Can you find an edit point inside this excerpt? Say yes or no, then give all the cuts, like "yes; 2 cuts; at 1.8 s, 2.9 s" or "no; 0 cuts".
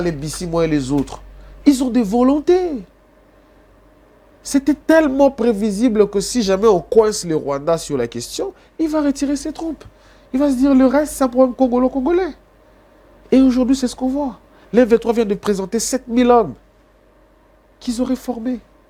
no; 0 cuts